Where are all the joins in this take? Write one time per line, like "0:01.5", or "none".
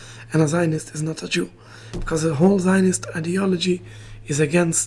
none